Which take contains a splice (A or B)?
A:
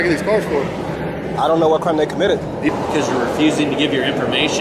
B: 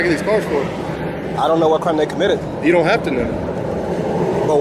A